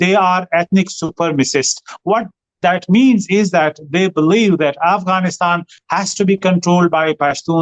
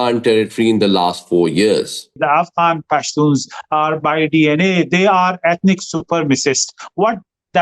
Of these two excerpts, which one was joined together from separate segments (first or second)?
second